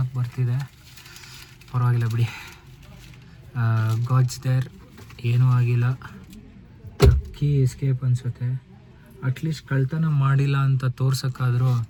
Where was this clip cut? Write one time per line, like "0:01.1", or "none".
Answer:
none